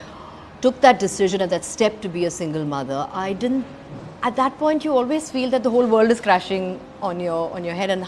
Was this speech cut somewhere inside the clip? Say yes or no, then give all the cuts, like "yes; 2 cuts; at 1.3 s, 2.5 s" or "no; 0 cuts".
no; 0 cuts